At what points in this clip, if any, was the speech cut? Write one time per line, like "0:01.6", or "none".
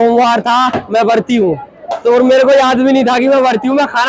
none